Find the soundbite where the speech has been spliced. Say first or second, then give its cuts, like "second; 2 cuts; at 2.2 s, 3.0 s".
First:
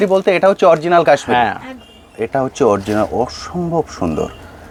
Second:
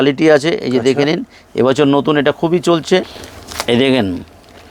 second; 1 cut; at 3.1 s